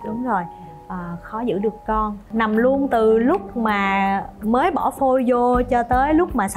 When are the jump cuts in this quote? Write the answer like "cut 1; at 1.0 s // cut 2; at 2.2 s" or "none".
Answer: cut 1; at 2.2 s